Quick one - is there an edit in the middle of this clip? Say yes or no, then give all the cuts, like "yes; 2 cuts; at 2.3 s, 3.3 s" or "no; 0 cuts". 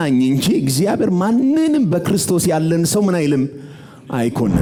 no; 0 cuts